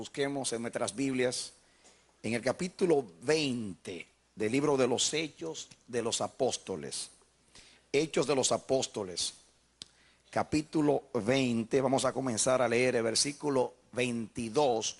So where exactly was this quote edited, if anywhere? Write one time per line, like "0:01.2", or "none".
none